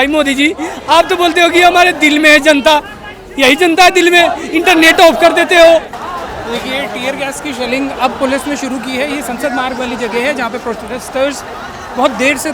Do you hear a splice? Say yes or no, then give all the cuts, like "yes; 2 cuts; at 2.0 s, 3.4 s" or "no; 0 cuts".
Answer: yes; 1 cut; at 6.0 s